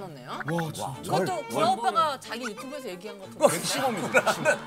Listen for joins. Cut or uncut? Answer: uncut